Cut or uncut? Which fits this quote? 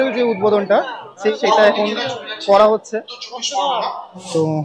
uncut